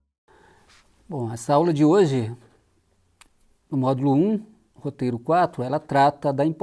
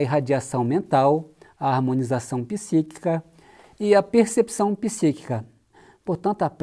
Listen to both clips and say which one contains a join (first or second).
second